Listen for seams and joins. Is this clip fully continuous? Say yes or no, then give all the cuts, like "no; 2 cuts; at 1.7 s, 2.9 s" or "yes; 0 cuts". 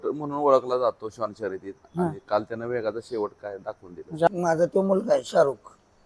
no; 1 cut; at 4.3 s